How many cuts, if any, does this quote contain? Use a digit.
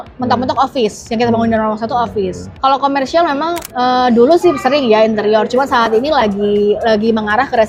1